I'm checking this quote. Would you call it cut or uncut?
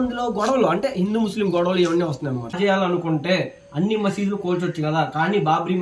cut